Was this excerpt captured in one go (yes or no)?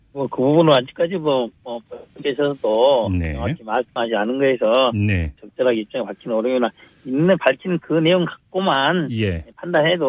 no